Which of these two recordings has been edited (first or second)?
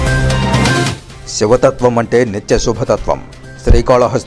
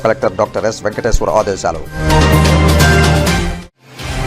first